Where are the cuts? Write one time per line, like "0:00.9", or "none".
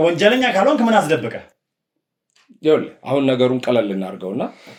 none